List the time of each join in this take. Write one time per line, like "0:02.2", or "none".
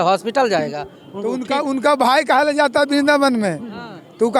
none